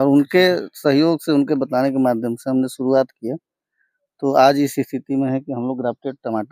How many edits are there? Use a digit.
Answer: 0